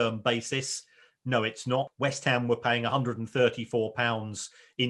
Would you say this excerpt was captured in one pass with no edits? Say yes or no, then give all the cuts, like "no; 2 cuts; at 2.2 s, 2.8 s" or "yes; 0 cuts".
no; 1 cut; at 1.9 s